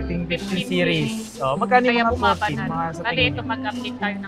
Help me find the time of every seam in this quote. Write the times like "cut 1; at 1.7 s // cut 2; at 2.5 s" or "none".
none